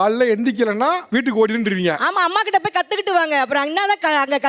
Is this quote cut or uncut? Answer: uncut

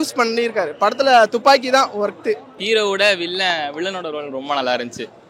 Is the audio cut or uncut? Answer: uncut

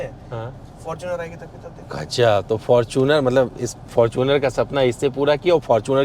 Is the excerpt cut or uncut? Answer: uncut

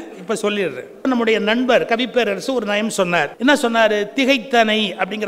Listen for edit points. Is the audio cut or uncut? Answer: cut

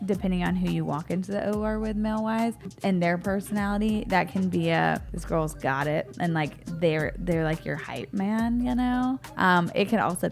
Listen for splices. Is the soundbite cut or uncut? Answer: cut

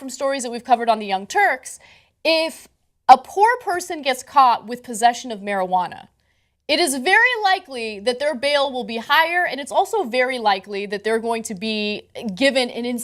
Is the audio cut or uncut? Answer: cut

